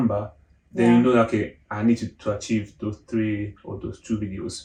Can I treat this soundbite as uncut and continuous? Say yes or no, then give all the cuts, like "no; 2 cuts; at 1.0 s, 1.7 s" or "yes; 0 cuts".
yes; 0 cuts